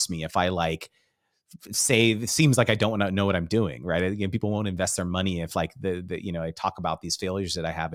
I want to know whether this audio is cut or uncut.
uncut